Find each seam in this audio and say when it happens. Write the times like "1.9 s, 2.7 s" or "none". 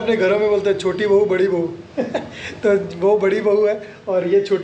none